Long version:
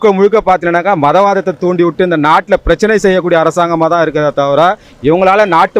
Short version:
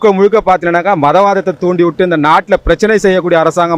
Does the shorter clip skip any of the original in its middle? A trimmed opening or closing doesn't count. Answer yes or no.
no